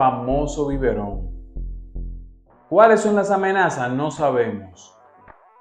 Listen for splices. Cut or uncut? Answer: uncut